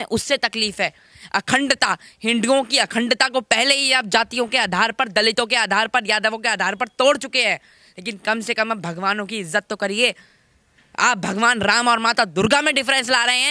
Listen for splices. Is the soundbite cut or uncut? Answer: uncut